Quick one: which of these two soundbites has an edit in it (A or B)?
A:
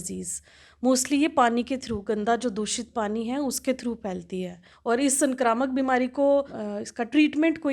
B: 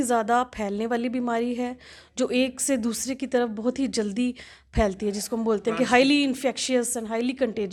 A